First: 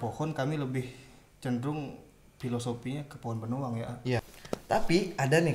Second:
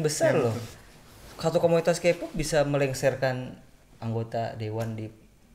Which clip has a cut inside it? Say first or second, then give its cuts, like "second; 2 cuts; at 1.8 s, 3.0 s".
first; 1 cut; at 4.3 s